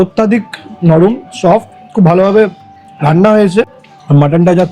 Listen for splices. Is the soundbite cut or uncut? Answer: cut